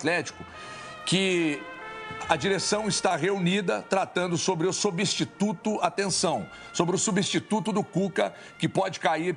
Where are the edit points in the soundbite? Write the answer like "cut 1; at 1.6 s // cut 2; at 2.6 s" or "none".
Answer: none